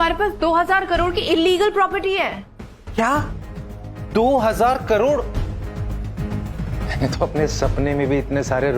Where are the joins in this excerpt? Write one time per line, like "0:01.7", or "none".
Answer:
0:06.7